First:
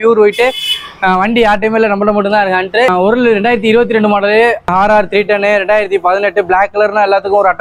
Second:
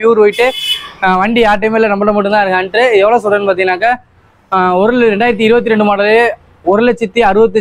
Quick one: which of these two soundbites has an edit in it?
first; 2 cuts; at 2.9 s, 4.7 s

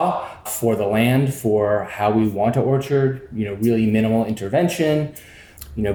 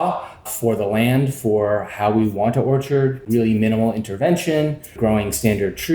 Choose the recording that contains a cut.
second; 2 cuts; at 3.2 s, 5.0 s

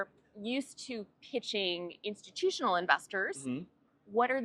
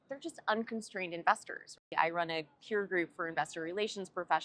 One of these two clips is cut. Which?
second; 1 cut; at 1.9 s

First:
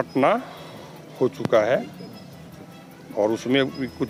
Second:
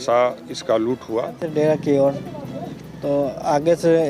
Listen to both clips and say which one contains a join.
second; 1 cut; at 1.4 s

